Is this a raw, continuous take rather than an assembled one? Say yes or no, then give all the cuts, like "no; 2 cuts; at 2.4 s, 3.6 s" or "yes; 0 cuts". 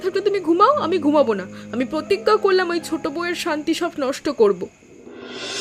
yes; 0 cuts